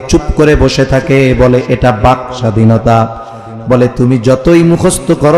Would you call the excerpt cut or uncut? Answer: uncut